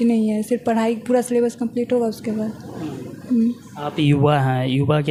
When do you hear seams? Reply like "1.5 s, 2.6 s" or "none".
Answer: none